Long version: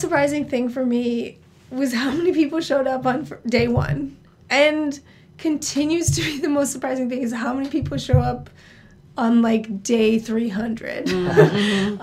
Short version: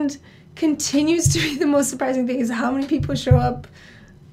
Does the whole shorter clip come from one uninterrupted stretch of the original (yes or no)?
yes